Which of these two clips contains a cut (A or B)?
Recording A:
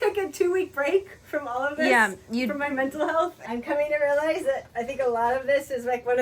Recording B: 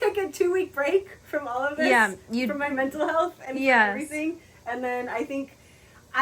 A